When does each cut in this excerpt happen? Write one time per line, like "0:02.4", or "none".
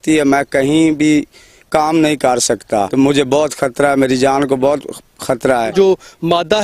0:02.9
0:05.7